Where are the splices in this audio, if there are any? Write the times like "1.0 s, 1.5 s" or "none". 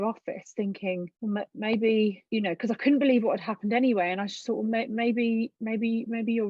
1.1 s, 2.2 s

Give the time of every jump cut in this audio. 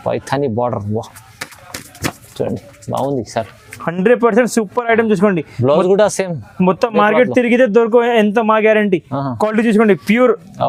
none

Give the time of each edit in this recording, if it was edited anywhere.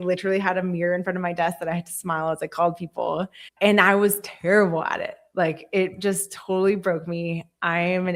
3.4 s

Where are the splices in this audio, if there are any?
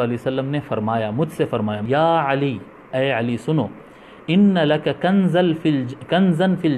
1.8 s

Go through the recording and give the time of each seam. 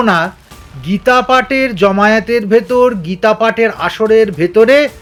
none

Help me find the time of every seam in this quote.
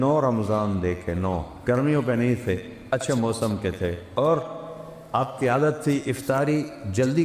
1.5 s, 4.0 s

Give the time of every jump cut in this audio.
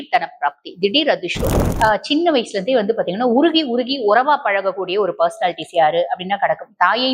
1.6 s

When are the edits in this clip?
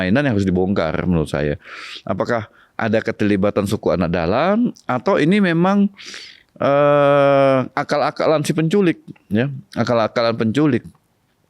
none

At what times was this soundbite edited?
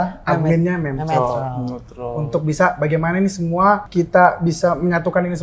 3.9 s

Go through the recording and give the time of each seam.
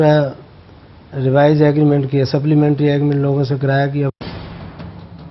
4.1 s

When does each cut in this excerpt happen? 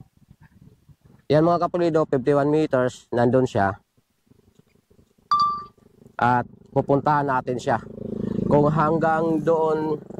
1.0 s

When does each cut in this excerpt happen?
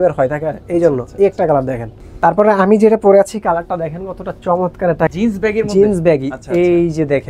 2.1 s, 5.1 s

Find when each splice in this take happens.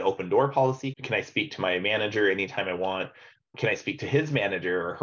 0.9 s, 3.5 s

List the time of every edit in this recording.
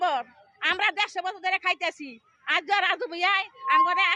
none

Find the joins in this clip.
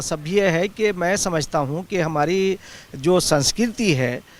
none

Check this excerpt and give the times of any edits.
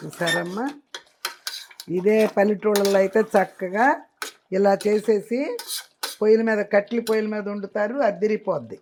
none

